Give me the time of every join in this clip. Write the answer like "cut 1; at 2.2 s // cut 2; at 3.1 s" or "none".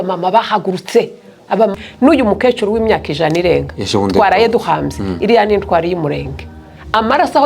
cut 1; at 1.7 s